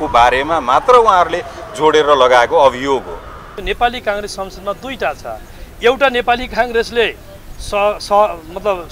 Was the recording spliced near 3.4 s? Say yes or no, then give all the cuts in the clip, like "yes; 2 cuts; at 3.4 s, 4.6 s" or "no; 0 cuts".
yes; 1 cut; at 3.4 s